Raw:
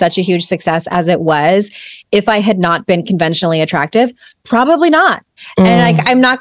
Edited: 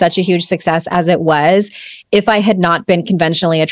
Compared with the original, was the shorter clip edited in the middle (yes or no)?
no